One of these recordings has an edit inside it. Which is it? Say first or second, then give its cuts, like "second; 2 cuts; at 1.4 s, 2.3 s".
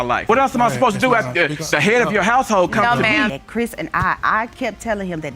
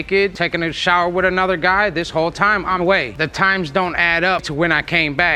first; 1 cut; at 3.3 s